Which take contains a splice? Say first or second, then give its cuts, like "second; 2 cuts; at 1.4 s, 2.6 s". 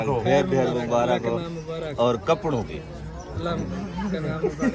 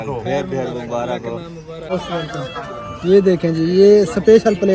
second; 1 cut; at 1.9 s